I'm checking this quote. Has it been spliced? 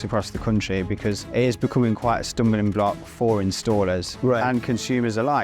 yes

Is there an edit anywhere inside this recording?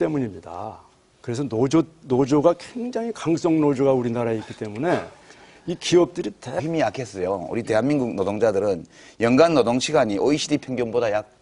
no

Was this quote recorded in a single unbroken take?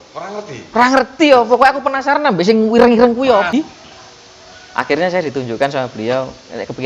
no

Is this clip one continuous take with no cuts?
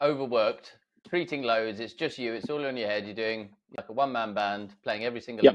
yes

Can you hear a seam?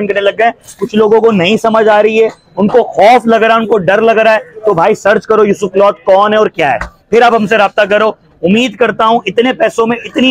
no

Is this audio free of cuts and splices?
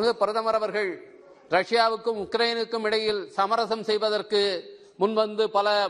yes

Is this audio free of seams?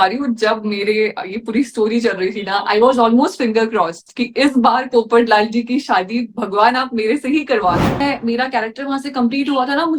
no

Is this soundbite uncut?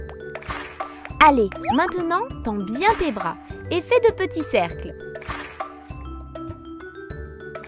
yes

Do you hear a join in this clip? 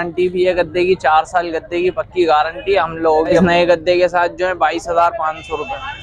yes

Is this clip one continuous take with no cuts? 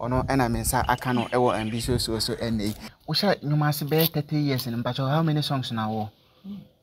no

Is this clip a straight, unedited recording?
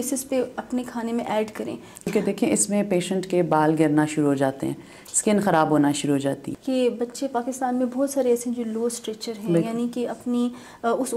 no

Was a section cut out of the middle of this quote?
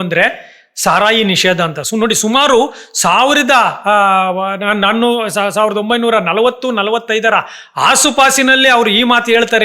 no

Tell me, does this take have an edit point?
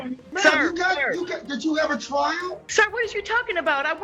yes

